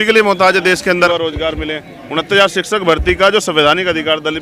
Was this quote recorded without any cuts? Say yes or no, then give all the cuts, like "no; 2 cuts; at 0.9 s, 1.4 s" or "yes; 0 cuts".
no; 1 cut; at 1.1 s